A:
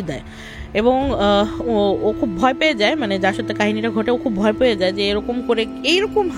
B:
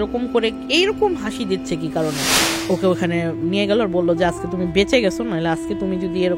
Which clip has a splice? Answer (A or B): B